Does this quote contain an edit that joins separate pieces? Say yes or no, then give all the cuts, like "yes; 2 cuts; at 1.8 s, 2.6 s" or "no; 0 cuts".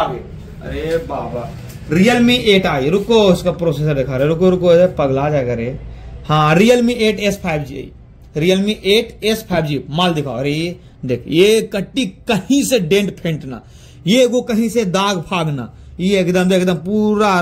no; 0 cuts